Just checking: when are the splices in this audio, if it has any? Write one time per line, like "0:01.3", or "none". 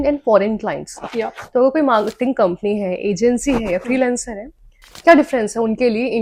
none